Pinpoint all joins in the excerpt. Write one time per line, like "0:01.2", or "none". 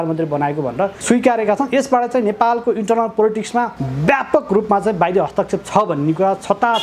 0:01.0
0:03.8